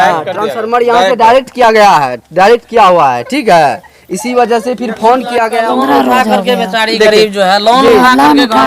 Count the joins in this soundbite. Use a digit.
1